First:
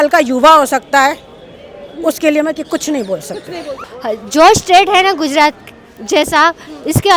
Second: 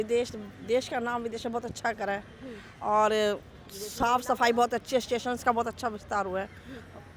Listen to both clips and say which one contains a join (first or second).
first